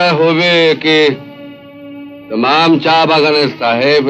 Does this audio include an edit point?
no; 0 cuts

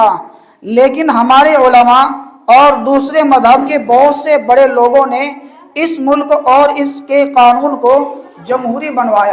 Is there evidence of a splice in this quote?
no; 0 cuts

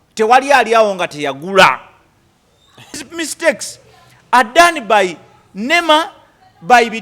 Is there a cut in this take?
yes; 1 cut; at 2.9 s

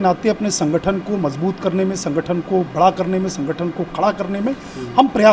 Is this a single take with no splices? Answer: yes; 0 cuts

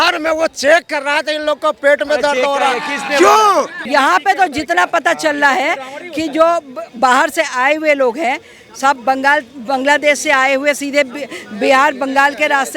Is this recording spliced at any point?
yes; 1 cut; at 3.8 s

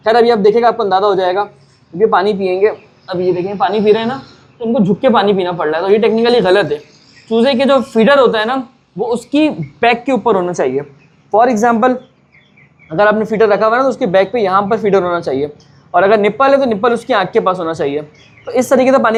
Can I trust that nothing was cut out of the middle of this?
yes; 0 cuts

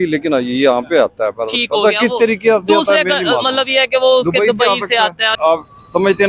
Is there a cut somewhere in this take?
yes; 1 cut; at 5.3 s

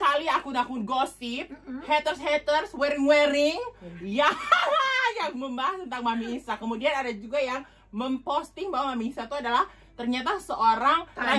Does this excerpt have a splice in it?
no; 0 cuts

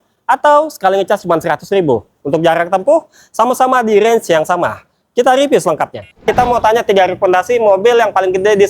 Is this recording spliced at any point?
yes; 1 cut; at 6.2 s

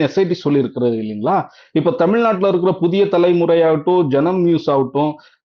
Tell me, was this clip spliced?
no; 0 cuts

